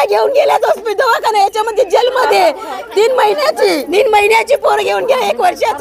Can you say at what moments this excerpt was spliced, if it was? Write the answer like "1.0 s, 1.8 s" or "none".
3.8 s